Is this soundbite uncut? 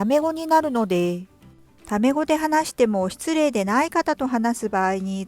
yes; 0 cuts

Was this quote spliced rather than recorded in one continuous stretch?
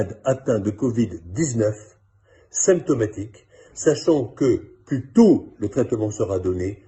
no; 0 cuts

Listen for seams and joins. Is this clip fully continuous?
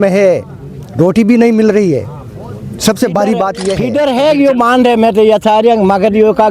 no; 1 cut; at 3.8 s

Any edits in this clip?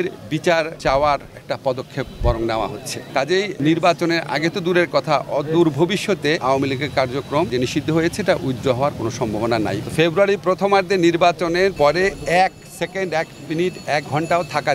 yes; 4 cuts; at 3.6 s, 6.4 s, 7.5 s, 9.8 s

